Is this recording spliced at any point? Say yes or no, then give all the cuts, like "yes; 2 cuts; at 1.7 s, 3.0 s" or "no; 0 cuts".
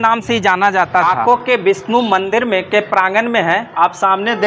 yes; 1 cut; at 1.0 s